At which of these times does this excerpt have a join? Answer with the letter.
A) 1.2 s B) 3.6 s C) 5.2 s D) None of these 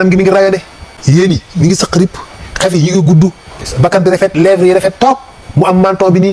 A